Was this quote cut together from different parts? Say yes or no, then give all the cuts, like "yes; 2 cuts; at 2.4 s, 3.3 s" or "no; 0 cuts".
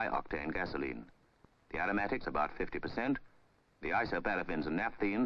yes; 1 cut; at 4.2 s